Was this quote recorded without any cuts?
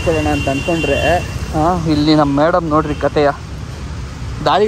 yes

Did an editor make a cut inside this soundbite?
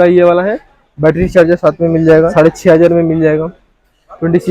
yes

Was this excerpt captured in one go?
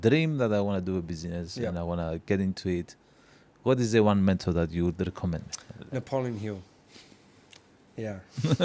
yes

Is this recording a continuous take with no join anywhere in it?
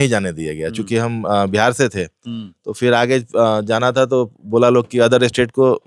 yes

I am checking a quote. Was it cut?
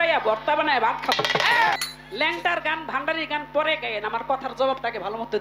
yes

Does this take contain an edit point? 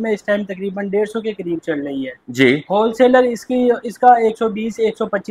no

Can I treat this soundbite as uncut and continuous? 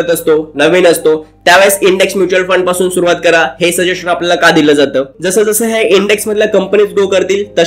no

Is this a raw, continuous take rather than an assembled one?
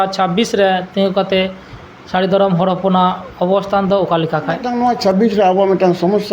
no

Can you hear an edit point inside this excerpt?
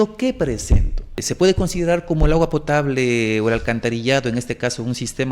yes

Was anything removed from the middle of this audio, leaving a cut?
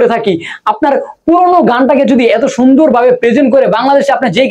no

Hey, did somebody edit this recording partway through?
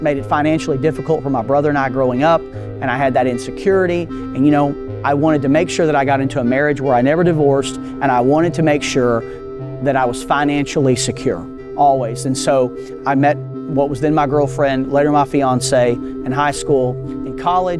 no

